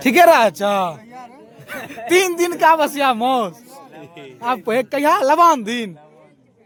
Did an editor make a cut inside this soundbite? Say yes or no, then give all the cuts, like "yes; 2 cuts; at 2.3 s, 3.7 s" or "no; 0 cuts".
no; 0 cuts